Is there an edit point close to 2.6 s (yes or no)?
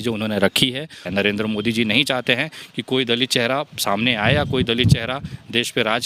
no